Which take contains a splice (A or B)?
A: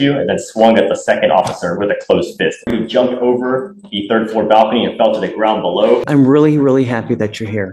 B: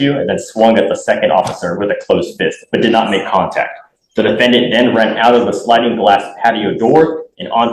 A